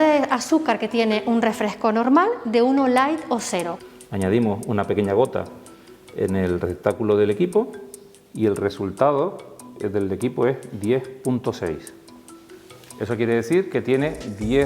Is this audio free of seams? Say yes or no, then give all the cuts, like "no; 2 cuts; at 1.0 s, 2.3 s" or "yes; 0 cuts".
no; 1 cut; at 3.7 s